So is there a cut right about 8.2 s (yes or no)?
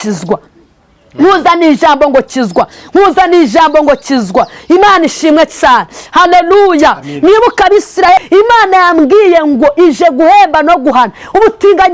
yes